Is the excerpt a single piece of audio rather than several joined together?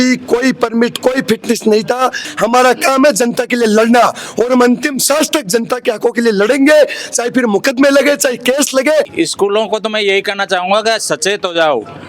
no; 2 cuts; at 2.3 s, 9.1 s

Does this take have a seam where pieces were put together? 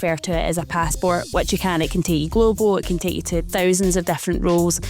yes; 1 cut; at 3.5 s

